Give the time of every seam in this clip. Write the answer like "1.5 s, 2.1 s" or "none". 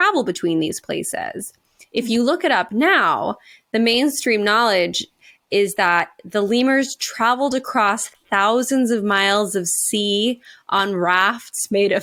none